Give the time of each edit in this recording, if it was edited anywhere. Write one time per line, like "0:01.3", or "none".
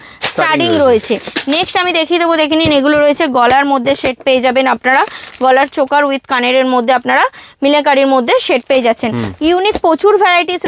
none